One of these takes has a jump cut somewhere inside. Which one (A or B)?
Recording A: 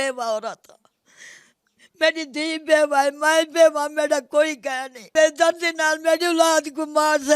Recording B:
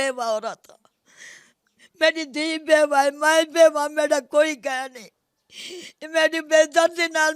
A